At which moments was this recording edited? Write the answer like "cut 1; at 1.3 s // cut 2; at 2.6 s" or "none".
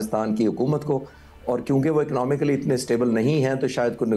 none